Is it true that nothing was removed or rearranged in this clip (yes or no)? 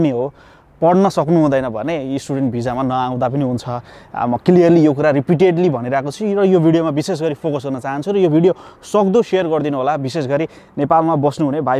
yes